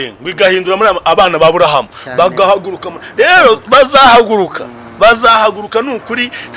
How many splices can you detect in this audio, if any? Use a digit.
0